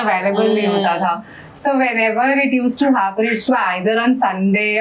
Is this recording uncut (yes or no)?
yes